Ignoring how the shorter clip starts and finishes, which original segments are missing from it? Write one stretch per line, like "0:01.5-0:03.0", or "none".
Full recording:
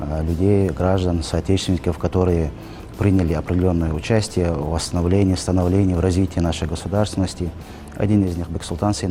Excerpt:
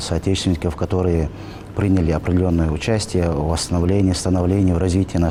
none